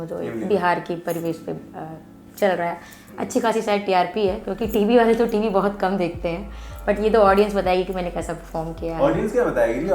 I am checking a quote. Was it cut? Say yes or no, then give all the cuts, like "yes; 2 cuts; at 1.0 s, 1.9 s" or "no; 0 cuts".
no; 0 cuts